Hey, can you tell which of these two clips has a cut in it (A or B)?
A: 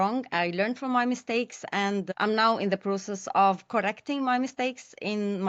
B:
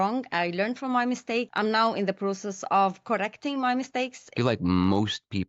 B